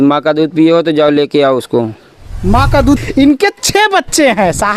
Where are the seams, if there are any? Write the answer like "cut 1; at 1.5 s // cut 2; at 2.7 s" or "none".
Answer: cut 1; at 3.0 s